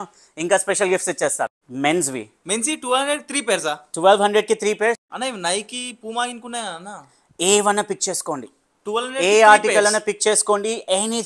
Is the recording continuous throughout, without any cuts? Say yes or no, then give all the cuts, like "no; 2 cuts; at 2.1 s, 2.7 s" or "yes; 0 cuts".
no; 2 cuts; at 1.6 s, 5.1 s